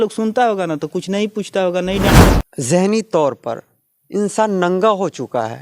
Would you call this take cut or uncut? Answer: cut